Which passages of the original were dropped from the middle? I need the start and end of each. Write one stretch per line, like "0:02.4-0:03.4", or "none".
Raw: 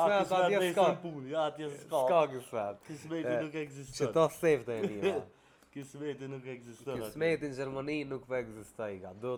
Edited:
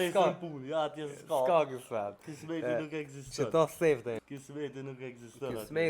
0:04.8-0:05.6